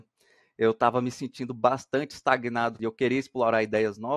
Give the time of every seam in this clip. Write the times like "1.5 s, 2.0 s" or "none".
2.8 s